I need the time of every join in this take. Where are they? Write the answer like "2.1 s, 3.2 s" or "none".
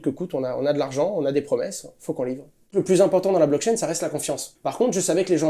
2.7 s, 4.4 s